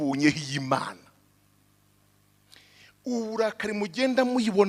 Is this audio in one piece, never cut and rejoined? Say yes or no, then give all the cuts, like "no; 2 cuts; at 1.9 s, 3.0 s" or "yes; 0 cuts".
yes; 0 cuts